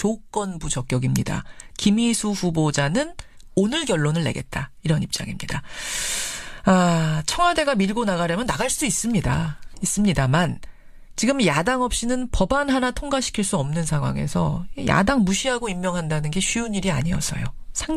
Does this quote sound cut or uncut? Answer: cut